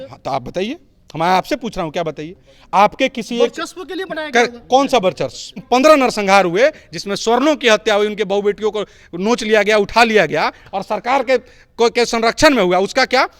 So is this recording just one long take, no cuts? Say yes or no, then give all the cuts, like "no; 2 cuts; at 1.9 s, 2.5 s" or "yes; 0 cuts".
no; 1 cut; at 5.6 s